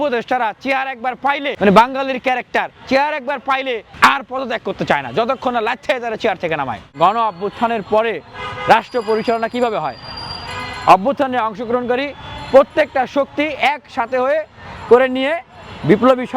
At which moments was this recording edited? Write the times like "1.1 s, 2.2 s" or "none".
1.5 s, 3.9 s, 6.8 s